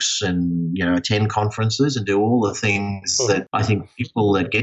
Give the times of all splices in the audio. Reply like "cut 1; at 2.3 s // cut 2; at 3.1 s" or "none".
cut 1; at 3.5 s